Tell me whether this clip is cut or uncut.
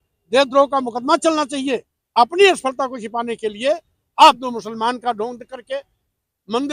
cut